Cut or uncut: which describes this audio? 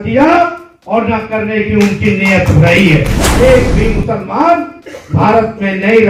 cut